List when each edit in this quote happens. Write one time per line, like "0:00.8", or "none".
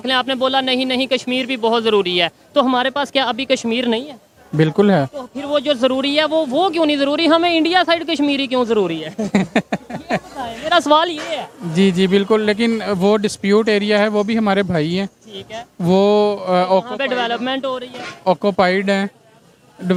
none